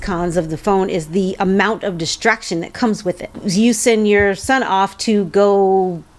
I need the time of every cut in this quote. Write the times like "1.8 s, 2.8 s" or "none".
3.4 s

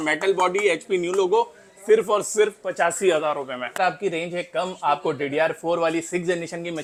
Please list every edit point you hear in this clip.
none

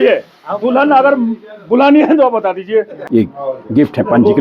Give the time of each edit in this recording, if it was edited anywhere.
3.0 s

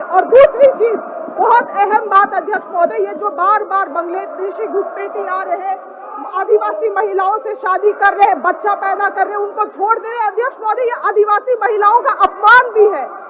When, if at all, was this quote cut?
none

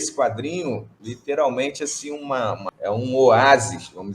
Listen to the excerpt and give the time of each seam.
0.9 s, 2.7 s

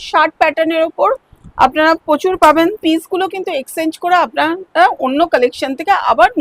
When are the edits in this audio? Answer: 2.8 s

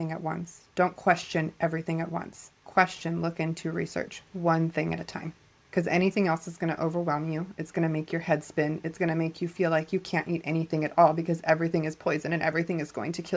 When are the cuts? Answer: none

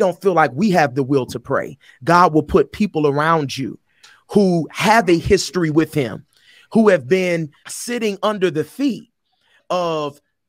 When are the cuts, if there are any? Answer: 7.6 s, 9.6 s

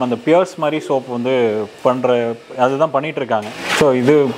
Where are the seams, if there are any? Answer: none

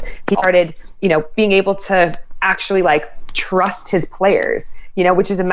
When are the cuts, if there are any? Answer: none

